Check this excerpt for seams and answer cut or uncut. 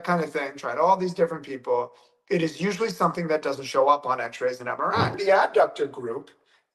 cut